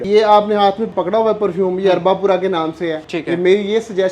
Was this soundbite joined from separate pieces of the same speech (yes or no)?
yes